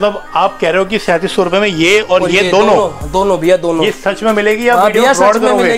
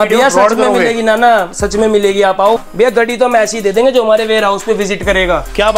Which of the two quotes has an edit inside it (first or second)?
second